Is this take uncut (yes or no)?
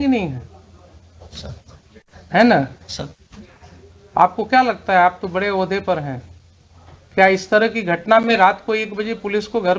yes